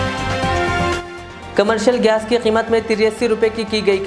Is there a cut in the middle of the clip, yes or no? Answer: no